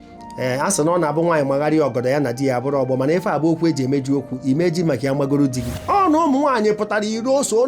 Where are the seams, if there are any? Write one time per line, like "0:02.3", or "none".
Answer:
0:05.7